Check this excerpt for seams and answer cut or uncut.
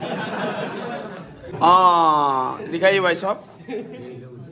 cut